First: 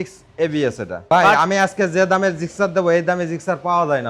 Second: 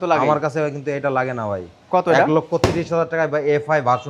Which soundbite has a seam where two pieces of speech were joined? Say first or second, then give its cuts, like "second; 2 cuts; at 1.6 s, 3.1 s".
first; 1 cut; at 1.0 s